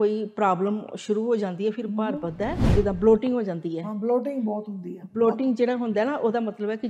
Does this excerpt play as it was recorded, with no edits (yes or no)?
no